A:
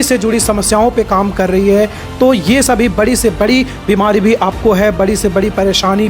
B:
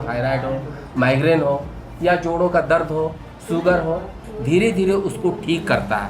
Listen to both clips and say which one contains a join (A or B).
B